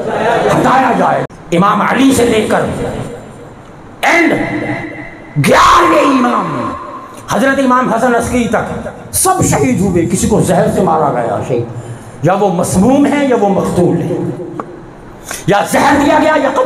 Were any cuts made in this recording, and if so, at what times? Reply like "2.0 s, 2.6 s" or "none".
1.2 s